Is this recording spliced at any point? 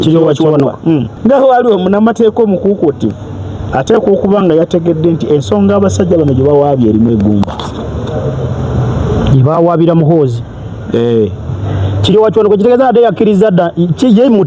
yes; 1 cut; at 1.1 s

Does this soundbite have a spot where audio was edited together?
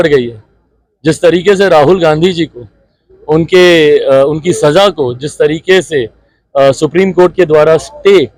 no; 0 cuts

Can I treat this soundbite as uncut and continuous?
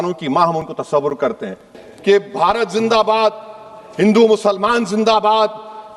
no; 1 cut; at 1.6 s

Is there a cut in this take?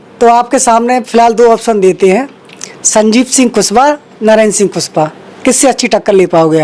no; 0 cuts

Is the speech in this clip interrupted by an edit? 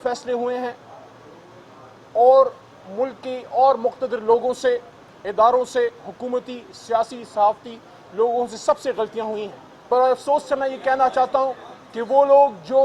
yes; 1 cut; at 9.9 s

